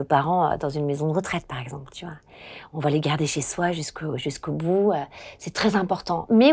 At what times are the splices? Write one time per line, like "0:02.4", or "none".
none